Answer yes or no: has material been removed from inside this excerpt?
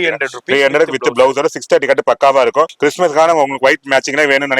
yes